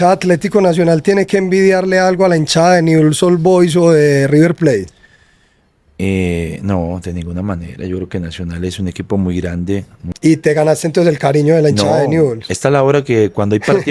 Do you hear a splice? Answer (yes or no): yes